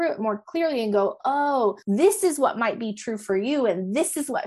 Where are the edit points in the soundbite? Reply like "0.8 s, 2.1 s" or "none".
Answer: 1.8 s